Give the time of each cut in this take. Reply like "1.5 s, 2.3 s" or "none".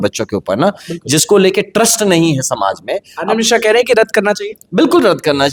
none

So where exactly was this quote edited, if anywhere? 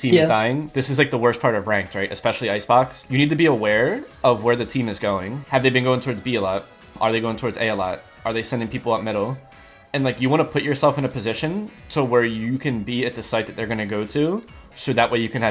3.1 s, 5.4 s, 7.0 s

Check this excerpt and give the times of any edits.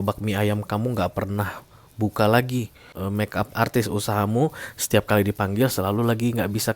2.8 s

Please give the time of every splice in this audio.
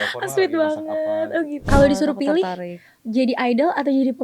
1.7 s

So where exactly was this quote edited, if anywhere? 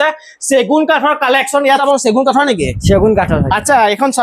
1.8 s

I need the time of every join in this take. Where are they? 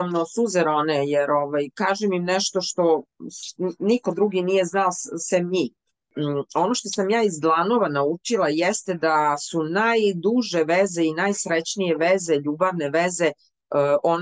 6.1 s

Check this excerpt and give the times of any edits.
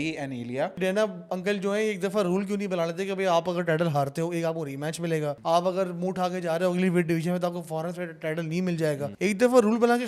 0.8 s, 5.4 s, 9.1 s

